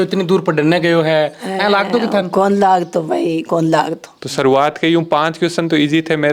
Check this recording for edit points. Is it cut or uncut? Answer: cut